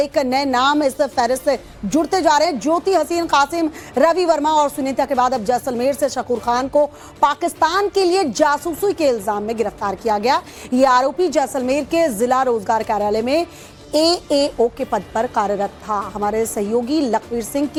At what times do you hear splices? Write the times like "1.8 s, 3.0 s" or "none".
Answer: none